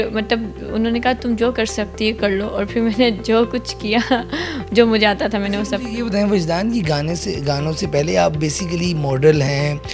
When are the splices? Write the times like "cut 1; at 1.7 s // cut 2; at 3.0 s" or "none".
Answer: none